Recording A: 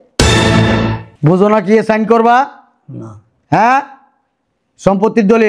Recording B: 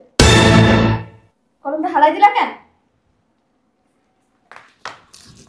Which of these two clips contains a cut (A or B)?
A